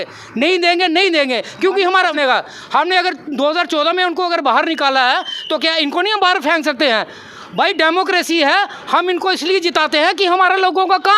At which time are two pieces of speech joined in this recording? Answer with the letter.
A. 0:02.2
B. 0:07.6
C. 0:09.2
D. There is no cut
A